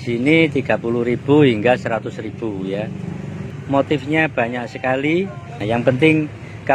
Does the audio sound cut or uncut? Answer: cut